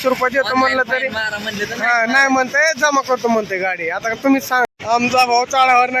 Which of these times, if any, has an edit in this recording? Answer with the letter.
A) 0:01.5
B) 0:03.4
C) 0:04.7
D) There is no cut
C